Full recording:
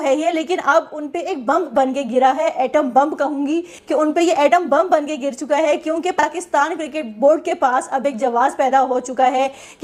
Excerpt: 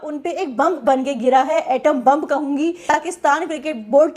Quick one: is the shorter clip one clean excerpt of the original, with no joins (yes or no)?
no